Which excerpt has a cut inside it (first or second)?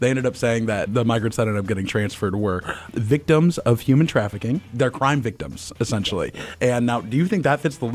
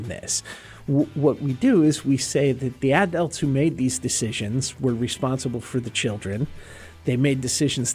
first